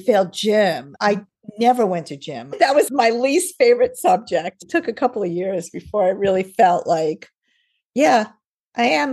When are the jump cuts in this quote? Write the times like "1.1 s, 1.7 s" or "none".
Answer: 0.9 s, 2.9 s, 4.5 s